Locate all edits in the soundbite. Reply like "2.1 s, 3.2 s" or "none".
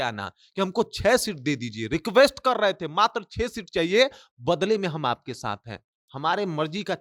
none